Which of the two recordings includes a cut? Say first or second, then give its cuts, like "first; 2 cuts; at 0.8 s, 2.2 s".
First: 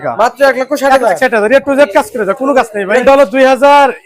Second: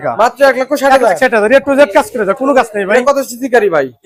first; 1 cut; at 3.0 s